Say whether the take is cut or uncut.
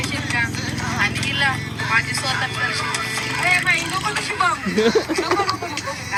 uncut